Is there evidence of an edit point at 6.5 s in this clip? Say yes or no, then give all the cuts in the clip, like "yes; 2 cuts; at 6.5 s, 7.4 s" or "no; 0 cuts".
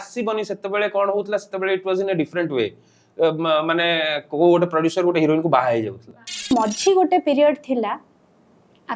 yes; 1 cut; at 6.5 s